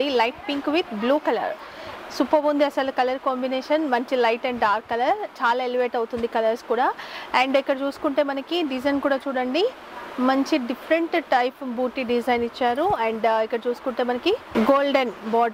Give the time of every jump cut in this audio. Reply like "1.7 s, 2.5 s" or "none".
none